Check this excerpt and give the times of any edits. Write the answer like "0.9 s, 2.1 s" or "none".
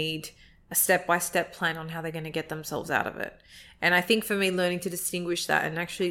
none